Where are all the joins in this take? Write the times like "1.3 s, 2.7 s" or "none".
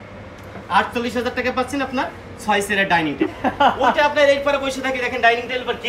3.2 s